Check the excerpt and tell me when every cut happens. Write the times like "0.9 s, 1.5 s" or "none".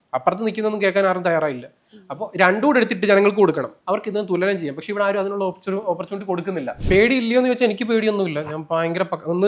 3.7 s, 6.7 s